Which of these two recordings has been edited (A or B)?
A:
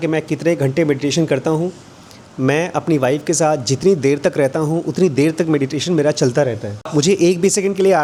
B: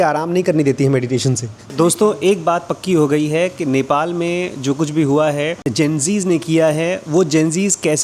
B